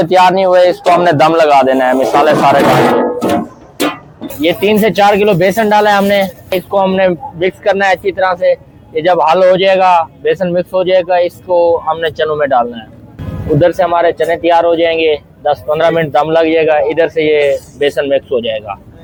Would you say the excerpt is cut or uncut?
uncut